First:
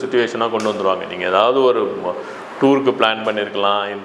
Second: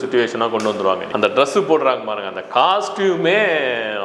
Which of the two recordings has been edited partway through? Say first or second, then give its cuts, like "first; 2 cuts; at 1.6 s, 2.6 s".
second; 1 cut; at 1.1 s